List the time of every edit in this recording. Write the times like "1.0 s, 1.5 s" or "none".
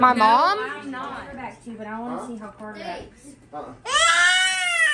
1.3 s